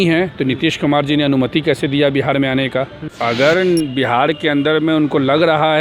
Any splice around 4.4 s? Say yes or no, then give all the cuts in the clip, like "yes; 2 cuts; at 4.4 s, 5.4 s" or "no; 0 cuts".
no; 1 cut; at 3.0 s